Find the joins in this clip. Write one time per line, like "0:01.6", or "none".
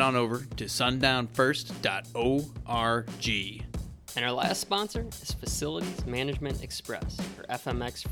0:03.6